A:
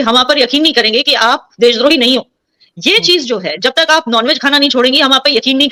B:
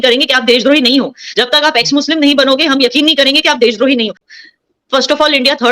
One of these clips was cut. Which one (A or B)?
B